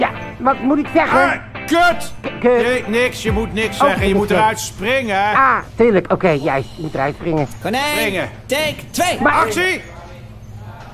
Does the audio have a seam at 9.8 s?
yes; 1 cut; at 9.8 s

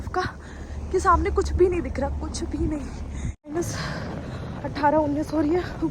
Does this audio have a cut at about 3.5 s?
yes; 1 cut; at 3.5 s

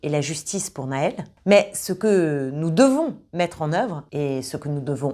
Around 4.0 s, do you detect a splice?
yes; 2 cuts; at 1.3 s, 4.0 s

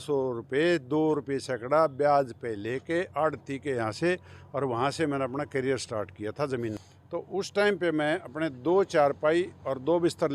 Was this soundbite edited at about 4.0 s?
no; 1 cut; at 6.9 s

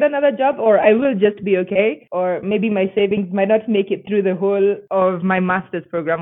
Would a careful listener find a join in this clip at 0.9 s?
no; 0 cuts

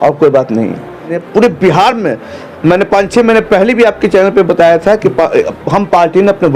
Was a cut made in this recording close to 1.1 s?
yes; 1 cut; at 1.1 s

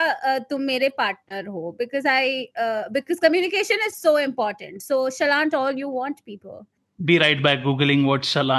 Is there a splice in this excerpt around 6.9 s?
yes; 1 cut; at 6.9 s

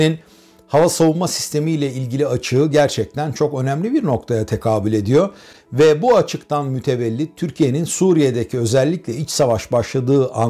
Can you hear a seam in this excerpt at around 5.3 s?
no; 0 cuts

